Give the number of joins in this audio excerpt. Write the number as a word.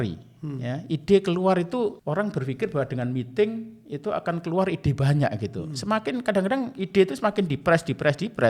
one